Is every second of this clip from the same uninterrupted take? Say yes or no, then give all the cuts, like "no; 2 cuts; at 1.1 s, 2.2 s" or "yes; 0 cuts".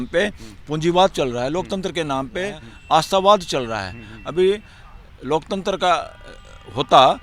yes; 0 cuts